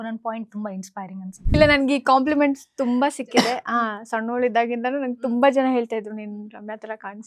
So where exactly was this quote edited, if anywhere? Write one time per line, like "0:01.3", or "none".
0:01.5